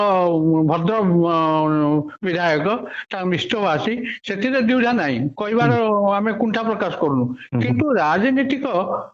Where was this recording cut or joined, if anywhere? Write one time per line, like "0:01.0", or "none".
none